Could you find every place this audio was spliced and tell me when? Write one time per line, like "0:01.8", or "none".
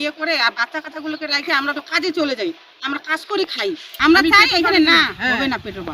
0:03.9